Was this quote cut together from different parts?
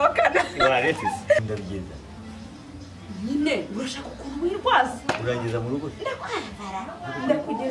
yes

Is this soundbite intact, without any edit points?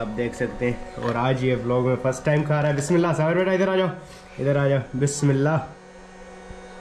yes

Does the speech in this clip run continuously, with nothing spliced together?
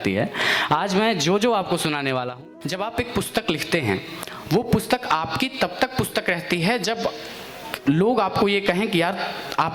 no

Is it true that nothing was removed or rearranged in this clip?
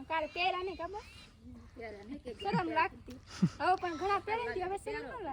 yes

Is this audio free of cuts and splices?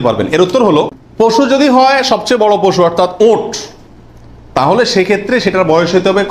yes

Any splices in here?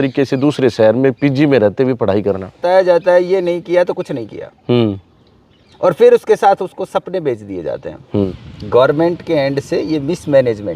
yes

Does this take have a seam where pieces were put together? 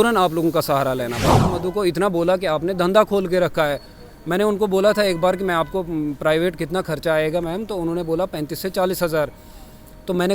yes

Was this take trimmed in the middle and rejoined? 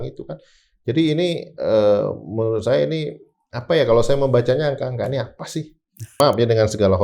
yes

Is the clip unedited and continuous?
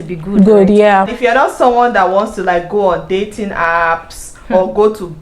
no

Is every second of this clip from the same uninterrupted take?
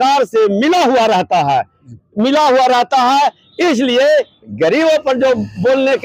yes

